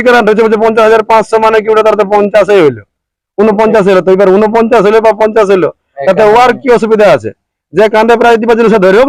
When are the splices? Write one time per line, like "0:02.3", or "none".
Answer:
none